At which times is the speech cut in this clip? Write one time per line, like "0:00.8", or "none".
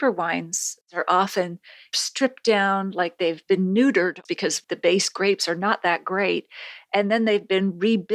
0:00.9
0:01.9
0:04.3